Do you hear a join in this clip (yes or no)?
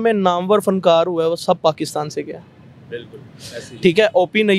no